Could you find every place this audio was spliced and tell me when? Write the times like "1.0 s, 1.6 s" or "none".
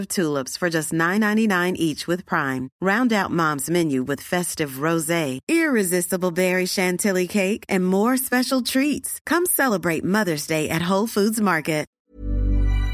11.9 s

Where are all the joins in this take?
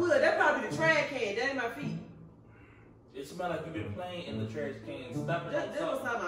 none

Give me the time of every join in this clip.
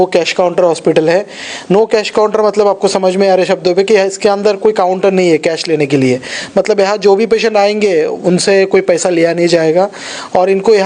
none

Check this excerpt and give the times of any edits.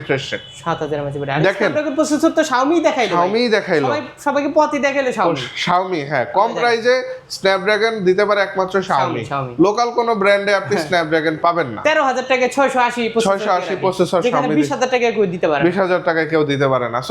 none

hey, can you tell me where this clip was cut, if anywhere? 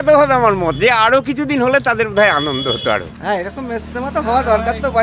3.1 s

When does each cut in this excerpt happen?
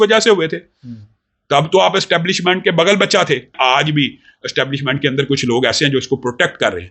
3.5 s

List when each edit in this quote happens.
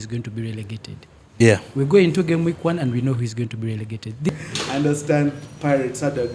4.3 s

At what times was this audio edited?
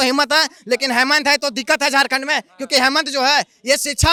none

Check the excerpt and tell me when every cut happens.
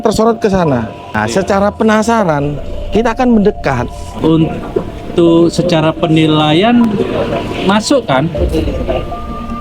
4.1 s

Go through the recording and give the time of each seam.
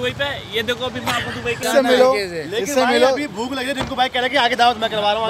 1.6 s

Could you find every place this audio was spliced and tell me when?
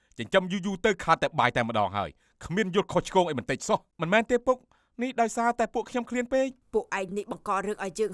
6.6 s

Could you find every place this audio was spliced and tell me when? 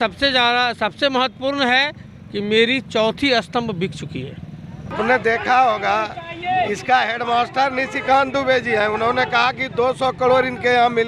4.9 s

